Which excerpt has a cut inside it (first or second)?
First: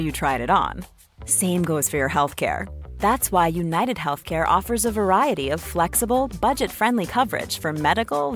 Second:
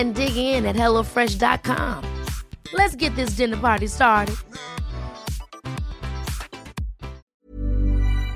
second